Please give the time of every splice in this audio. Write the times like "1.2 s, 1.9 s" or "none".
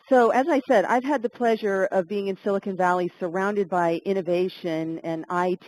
2.3 s